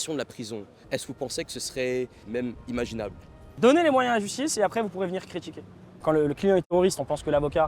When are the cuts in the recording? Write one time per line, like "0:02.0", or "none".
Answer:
0:02.2
0:03.4
0:06.0